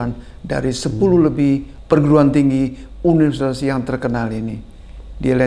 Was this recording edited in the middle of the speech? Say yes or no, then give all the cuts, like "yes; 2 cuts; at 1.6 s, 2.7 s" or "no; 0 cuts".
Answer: yes; 1 cut; at 1.7 s